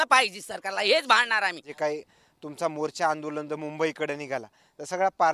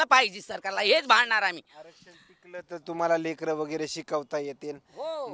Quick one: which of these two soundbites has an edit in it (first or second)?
first